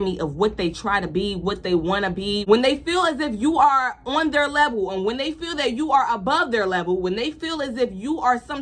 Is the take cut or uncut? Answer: cut